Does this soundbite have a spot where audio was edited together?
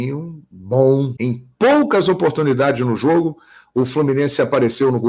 yes; 1 cut; at 1.1 s

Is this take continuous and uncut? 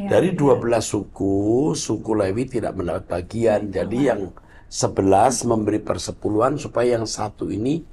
yes; 0 cuts

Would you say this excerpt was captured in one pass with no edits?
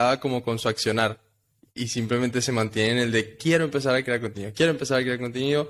yes; 0 cuts

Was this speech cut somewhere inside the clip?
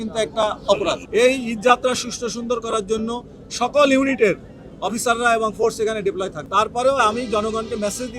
yes; 2 cuts; at 1.0 s, 6.4 s

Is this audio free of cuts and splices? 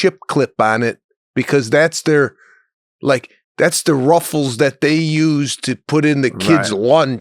yes; 0 cuts

